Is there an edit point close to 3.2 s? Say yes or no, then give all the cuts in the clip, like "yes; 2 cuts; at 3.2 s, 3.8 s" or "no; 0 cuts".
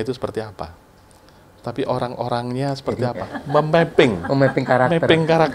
yes; 1 cut; at 3.2 s